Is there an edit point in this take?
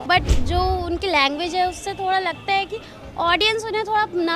no; 0 cuts

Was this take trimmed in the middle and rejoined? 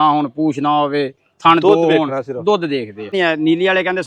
yes; 1 cut; at 3.1 s

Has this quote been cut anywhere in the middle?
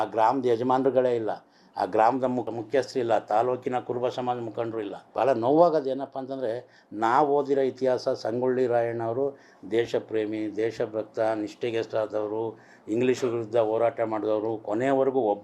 yes; 2 cuts; at 2.5 s, 5.0 s

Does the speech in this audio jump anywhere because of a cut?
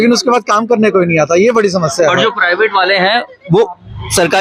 no; 0 cuts

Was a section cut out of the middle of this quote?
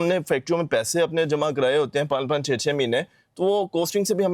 no; 0 cuts

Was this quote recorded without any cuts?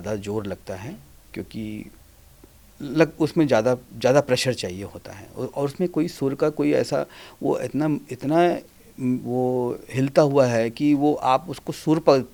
yes; 0 cuts

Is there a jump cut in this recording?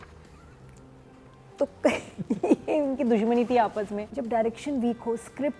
yes; 1 cut; at 4.1 s

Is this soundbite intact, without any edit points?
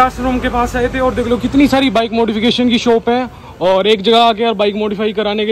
yes; 0 cuts

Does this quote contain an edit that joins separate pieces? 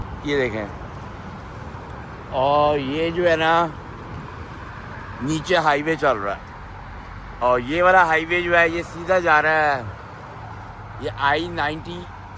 no; 0 cuts

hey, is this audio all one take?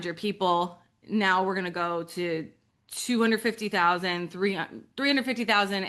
yes; 0 cuts

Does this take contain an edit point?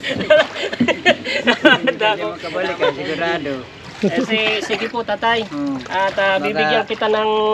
yes; 1 cut; at 3.8 s

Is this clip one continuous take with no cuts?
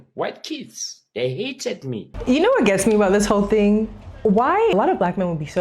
no; 2 cuts; at 2.1 s, 4.7 s

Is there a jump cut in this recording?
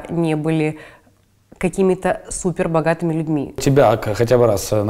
yes; 1 cut; at 3.6 s

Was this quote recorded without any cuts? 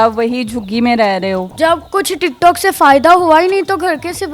no; 1 cut; at 1.5 s

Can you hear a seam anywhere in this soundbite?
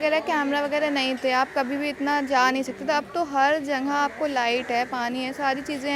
no; 0 cuts

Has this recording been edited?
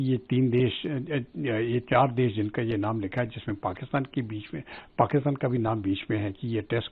no; 0 cuts

